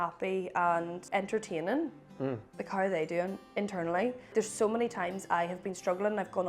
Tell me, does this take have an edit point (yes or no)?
yes